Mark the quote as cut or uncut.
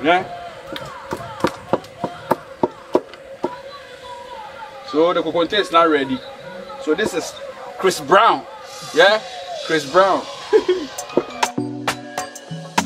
cut